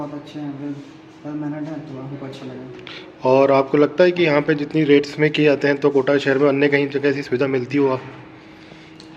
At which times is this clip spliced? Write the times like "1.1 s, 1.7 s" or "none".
none